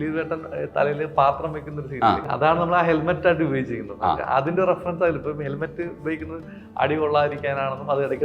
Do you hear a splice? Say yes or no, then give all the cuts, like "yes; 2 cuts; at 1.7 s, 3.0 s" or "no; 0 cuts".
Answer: yes; 1 cut; at 2.2 s